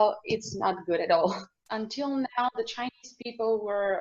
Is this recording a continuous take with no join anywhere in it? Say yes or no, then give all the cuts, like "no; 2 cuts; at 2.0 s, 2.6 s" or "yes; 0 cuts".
no; 1 cut; at 1.6 s